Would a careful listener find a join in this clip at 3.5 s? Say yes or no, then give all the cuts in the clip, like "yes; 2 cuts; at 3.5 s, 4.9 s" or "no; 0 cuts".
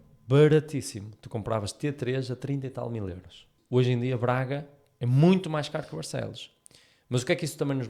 yes; 1 cut; at 3.5 s